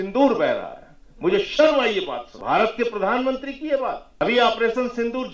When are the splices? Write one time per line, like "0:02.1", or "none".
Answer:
0:02.3
0:04.1